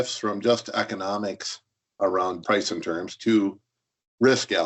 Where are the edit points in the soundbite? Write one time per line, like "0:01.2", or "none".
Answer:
0:02.4